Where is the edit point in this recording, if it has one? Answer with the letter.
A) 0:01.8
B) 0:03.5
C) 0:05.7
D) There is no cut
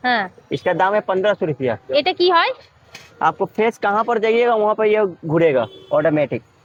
D